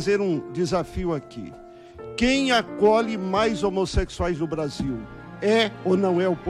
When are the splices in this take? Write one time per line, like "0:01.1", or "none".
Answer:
none

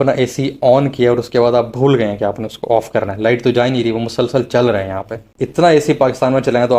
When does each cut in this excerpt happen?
0:05.3

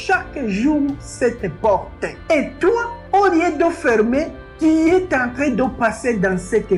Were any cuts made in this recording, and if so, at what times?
none

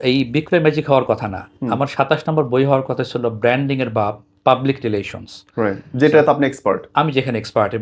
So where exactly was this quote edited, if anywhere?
none

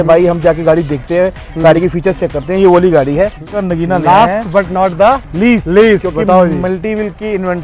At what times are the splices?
0:03.6

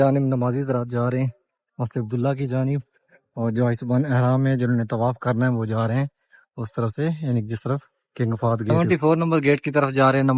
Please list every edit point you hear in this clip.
0:08.7

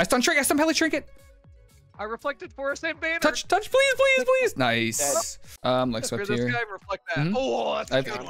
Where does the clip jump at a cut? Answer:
0:05.4

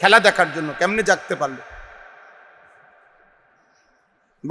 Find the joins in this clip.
none

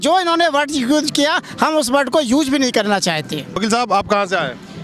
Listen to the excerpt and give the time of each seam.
none

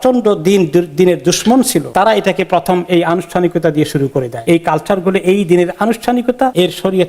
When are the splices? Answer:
0:01.9
0:04.4

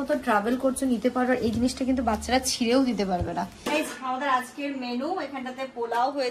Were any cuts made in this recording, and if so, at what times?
0:03.5

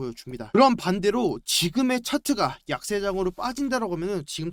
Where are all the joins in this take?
none

